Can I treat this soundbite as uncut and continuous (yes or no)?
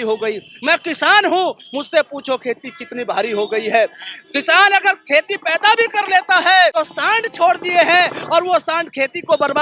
no